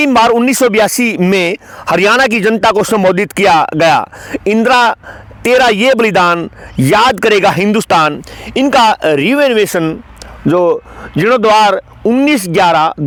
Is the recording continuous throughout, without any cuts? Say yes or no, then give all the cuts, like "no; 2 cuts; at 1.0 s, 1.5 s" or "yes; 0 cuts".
yes; 0 cuts